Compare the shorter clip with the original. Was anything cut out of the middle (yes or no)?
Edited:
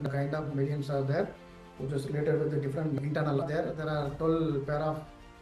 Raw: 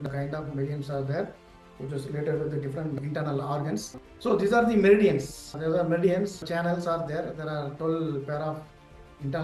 yes